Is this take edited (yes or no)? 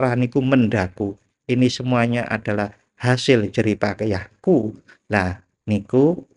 yes